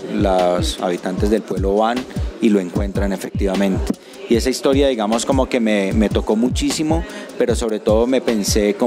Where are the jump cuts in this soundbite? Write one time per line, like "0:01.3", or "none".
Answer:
none